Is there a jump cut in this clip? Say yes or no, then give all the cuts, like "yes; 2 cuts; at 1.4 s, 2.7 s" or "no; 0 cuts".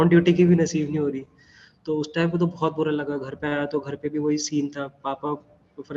no; 0 cuts